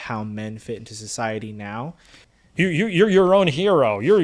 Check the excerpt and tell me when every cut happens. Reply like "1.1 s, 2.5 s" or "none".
2.2 s